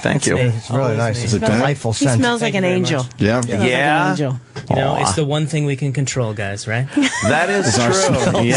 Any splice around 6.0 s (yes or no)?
yes